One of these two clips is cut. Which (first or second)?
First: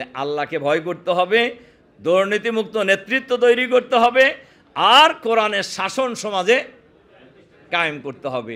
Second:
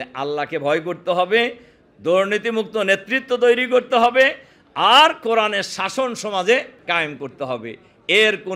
second